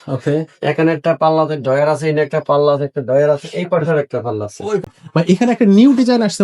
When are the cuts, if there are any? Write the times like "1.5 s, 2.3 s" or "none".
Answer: 4.8 s